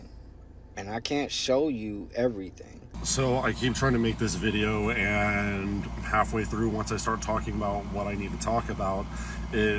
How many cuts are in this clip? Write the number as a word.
one